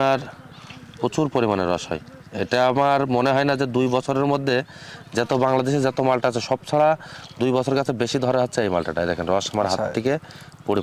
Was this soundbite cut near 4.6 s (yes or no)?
no